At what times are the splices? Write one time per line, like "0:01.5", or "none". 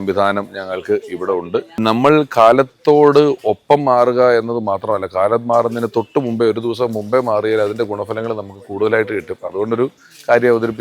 0:01.7